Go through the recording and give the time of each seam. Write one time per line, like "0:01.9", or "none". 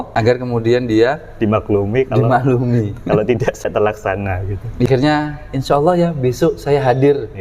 0:04.9